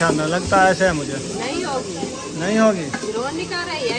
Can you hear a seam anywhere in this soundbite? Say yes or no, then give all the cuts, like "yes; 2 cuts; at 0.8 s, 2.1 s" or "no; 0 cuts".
no; 0 cuts